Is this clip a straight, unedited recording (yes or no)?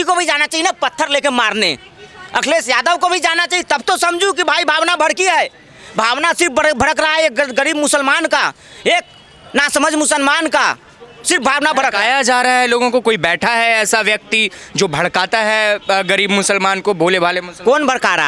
yes